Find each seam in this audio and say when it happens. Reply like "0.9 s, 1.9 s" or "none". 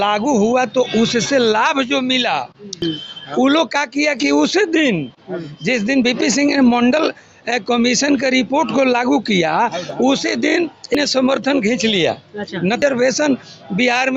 2.8 s, 10.9 s, 12.8 s